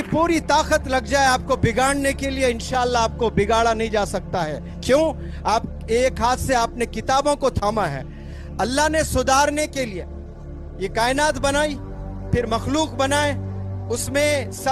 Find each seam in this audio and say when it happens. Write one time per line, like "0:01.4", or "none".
none